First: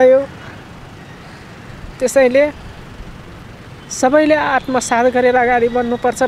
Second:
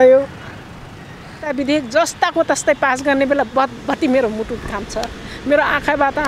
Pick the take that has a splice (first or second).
second